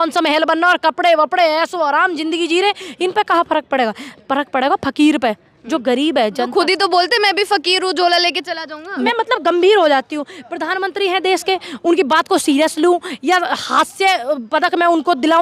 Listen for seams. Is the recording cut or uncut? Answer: cut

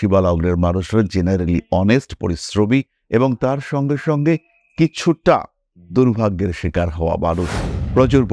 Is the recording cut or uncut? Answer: uncut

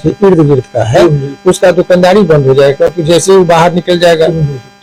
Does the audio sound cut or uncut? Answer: uncut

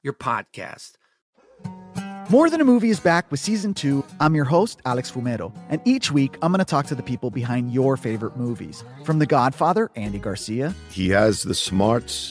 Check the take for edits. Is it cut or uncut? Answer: cut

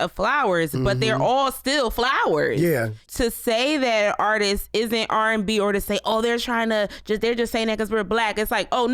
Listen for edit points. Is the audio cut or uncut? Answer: cut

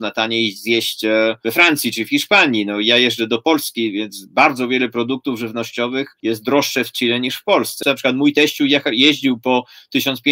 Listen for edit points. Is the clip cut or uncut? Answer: cut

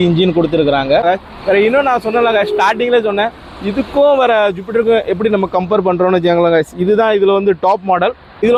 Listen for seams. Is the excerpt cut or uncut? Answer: uncut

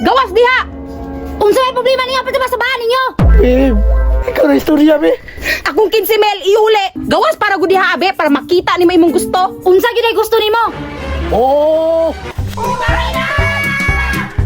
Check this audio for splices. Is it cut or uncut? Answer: cut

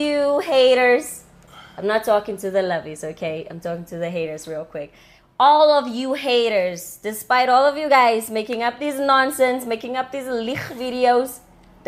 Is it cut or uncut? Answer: uncut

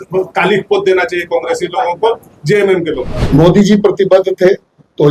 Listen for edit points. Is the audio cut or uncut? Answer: cut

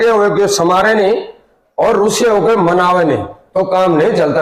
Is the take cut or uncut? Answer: uncut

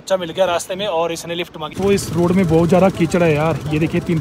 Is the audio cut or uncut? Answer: cut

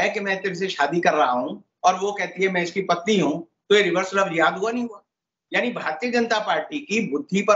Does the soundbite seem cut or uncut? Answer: uncut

